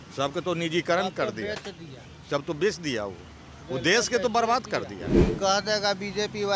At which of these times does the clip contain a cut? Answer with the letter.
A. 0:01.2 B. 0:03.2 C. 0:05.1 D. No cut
C